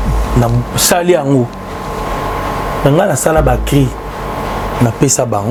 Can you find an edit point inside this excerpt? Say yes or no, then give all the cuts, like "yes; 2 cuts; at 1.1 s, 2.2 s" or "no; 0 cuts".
no; 0 cuts